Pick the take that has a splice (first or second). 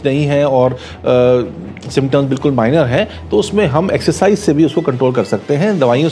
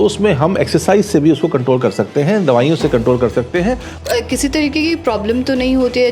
second